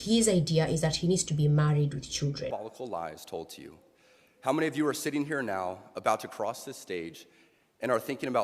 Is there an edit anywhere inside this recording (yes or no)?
yes